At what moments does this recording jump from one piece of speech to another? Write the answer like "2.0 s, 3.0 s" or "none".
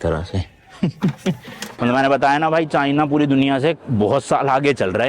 1.8 s